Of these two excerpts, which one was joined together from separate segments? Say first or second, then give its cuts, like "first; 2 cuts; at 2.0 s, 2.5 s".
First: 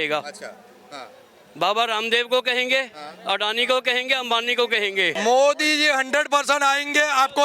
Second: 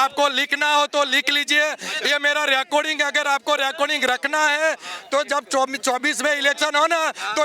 first; 1 cut; at 5.2 s